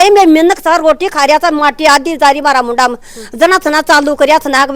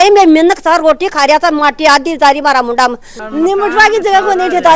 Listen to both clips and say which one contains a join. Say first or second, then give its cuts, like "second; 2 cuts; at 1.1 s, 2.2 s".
second; 1 cut; at 3.2 s